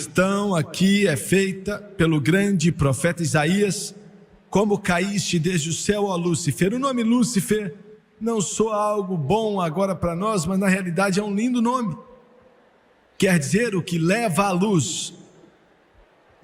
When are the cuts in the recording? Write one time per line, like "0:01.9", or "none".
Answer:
none